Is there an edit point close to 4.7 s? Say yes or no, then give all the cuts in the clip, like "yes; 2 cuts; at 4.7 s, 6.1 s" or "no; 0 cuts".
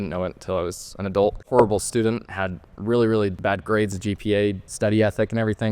yes; 3 cuts; at 1.4 s, 3.4 s, 4.7 s